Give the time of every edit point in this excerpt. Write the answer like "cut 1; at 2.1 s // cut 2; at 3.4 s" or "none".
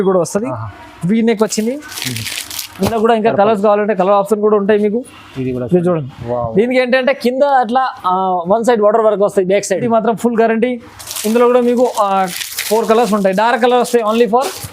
cut 1; at 9.8 s

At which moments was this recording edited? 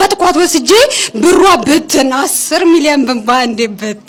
none

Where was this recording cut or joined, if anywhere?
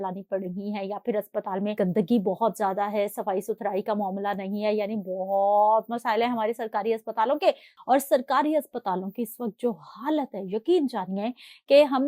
cut 1; at 1.8 s // cut 2; at 7.7 s

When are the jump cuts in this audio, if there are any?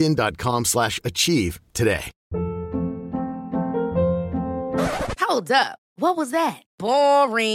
cut 1; at 2.1 s

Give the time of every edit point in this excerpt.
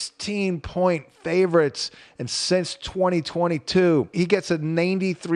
cut 1; at 4.1 s

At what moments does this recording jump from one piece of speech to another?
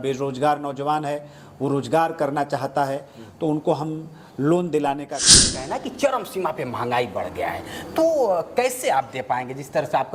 cut 1; at 5.6 s

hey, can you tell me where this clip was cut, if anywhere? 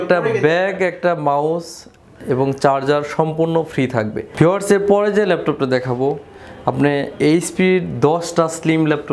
cut 1; at 4.2 s

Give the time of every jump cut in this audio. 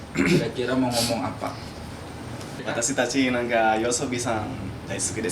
cut 1; at 2.6 s

